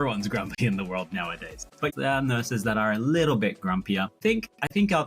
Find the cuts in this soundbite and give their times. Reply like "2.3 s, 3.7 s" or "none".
1.9 s, 4.1 s